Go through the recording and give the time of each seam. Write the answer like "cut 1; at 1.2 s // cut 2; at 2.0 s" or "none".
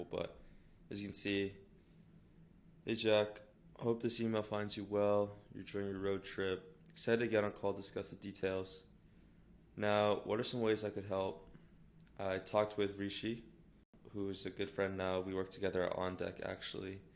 cut 1; at 14.0 s